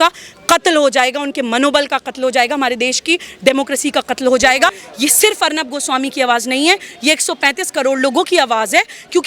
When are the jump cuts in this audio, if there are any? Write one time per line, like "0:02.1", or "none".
0:04.8